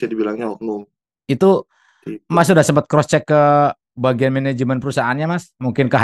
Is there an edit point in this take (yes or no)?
no